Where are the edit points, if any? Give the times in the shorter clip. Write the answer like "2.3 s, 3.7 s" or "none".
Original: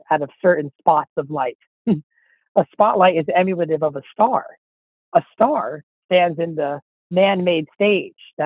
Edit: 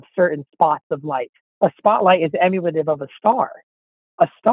1.4 s